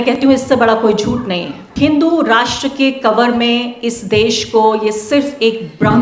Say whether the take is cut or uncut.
cut